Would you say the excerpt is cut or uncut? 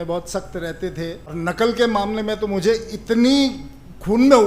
cut